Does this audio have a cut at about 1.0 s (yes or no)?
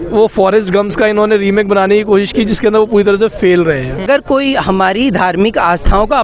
no